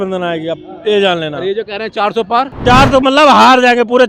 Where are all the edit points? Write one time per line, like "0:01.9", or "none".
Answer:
0:02.6